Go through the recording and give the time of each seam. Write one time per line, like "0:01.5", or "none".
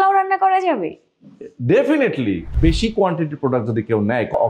0:02.5